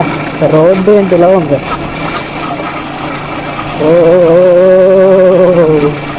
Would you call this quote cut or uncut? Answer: uncut